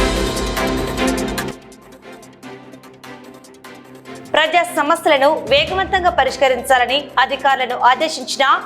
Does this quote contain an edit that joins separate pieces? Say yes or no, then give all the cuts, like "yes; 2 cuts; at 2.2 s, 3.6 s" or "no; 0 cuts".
yes; 2 cuts; at 1.5 s, 4.3 s